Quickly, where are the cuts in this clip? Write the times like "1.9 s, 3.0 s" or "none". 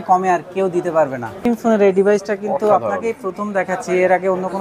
1.5 s

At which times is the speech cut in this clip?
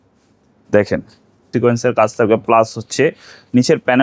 1.5 s

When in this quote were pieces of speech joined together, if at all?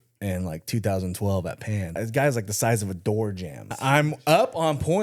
2.0 s, 3.7 s

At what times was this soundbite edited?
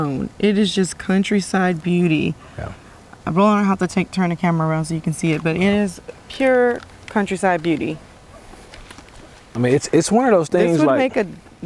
none

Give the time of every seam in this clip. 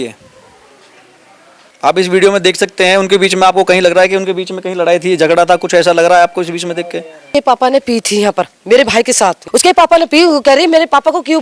7.3 s, 9.4 s

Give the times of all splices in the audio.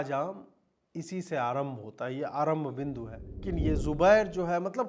3.4 s

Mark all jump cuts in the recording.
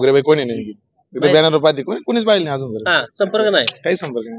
none

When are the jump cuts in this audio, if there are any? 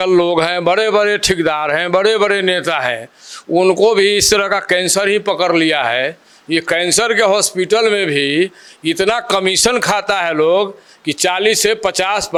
none

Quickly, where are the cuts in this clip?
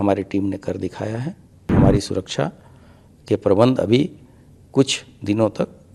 1.7 s

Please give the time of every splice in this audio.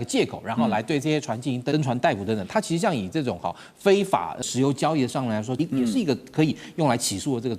1.7 s, 4.4 s, 5.5 s

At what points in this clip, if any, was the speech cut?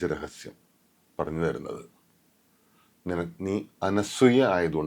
none

